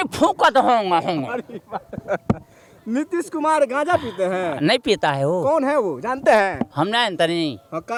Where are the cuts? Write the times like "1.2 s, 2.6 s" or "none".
none